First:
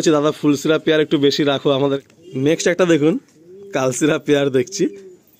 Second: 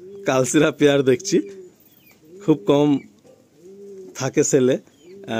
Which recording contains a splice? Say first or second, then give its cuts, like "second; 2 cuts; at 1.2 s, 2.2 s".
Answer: first; 1 cut; at 2.0 s